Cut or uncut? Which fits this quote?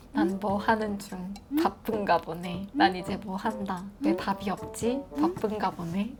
uncut